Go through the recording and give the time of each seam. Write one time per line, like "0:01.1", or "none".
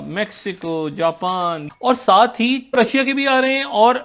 0:01.6
0:02.8